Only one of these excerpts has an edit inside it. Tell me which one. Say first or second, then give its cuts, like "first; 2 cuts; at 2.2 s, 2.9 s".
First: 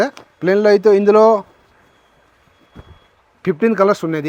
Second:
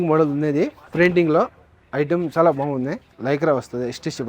second; 1 cut; at 3.1 s